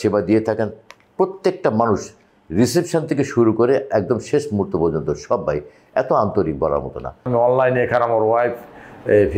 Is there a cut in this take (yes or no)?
yes